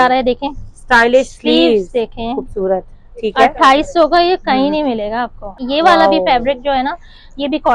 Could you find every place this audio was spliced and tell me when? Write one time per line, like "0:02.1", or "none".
0:05.6